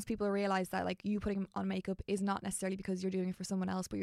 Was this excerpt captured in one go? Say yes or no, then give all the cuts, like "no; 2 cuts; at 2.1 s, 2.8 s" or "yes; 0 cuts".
yes; 0 cuts